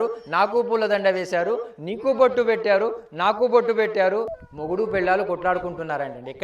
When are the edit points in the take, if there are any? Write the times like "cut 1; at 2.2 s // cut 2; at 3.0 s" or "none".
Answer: cut 1; at 4.4 s

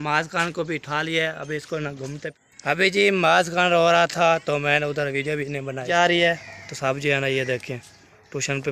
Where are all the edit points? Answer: cut 1; at 2.3 s // cut 2; at 5.8 s

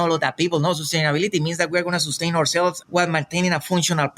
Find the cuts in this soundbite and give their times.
cut 1; at 2.8 s

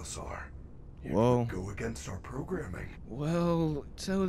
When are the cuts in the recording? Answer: cut 1; at 3.0 s

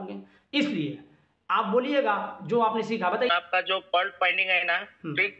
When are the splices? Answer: cut 1; at 3.3 s

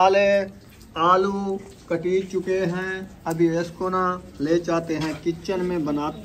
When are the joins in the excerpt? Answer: none

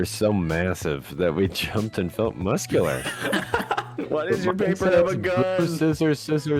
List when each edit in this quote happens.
cut 1; at 4.0 s

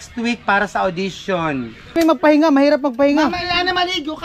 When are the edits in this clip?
cut 1; at 2.0 s

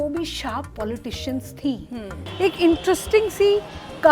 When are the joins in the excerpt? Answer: cut 1; at 2.2 s

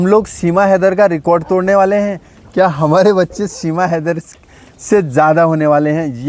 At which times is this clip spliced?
none

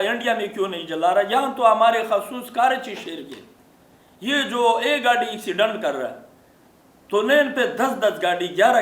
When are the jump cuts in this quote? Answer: none

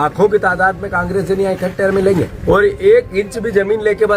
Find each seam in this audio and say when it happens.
cut 1; at 2.3 s

